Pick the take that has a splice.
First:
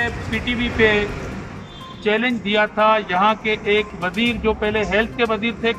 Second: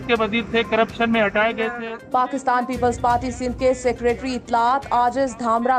second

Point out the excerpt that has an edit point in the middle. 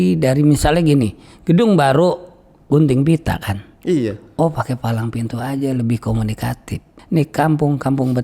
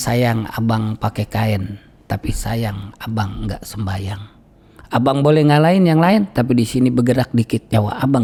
first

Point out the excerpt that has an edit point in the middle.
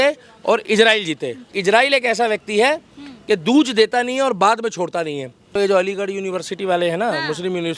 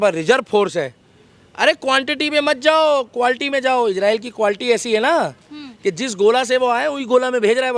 first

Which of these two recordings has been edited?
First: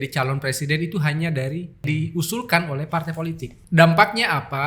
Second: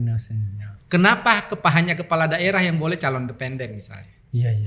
first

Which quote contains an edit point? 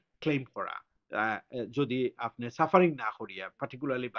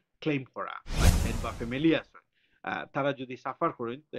second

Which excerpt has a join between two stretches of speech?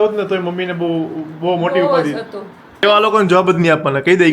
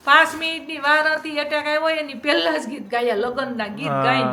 first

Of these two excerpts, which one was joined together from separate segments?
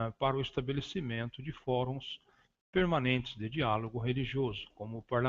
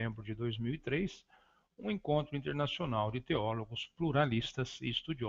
first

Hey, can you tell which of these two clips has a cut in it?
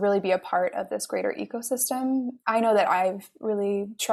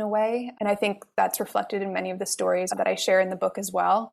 second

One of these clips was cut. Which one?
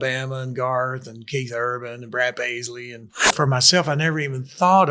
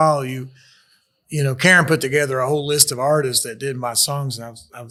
first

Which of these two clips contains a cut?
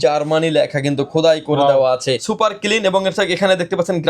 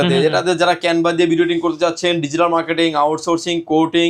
first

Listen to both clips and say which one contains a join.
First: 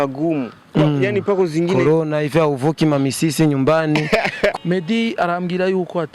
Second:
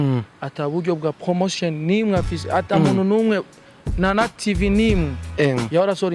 first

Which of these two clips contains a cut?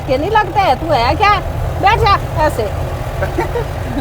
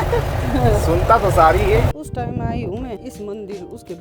second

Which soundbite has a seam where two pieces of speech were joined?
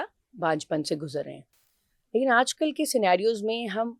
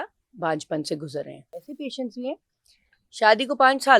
second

